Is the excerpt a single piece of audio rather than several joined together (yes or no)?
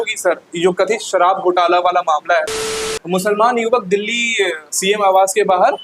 no